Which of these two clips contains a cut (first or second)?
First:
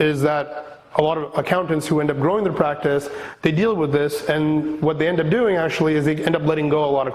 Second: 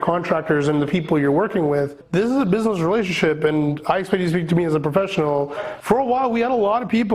second